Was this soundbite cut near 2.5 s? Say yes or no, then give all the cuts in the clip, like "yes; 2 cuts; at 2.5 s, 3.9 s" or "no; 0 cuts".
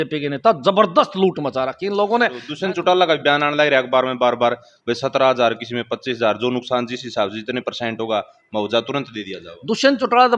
yes; 1 cut; at 2.5 s